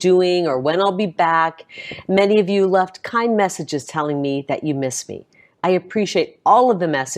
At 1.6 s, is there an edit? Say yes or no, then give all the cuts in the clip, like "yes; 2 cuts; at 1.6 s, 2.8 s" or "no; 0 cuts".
yes; 1 cut; at 1.6 s